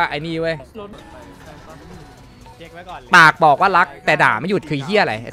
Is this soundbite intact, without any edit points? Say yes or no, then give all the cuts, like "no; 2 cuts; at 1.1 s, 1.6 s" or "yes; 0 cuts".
no; 1 cut; at 0.9 s